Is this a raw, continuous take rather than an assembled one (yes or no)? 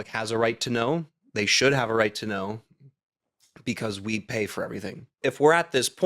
no